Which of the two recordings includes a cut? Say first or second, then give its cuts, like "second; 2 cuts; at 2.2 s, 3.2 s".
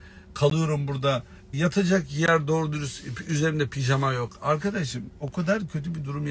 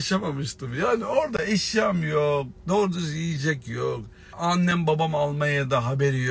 first; 1 cut; at 1.5 s